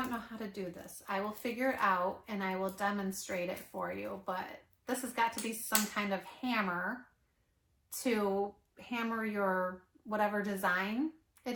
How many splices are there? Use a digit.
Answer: 0